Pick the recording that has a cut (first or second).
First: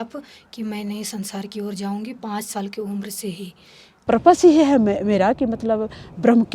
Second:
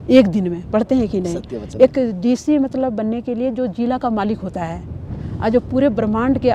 first